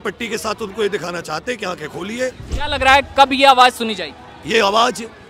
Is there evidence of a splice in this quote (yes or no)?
yes